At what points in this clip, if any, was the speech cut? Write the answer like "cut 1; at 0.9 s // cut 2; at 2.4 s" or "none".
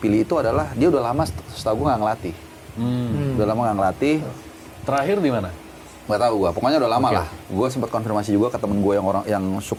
none